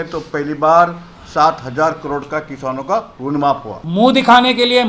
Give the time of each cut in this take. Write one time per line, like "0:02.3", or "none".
0:03.8